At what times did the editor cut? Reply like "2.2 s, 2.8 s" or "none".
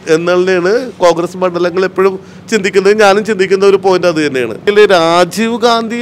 4.7 s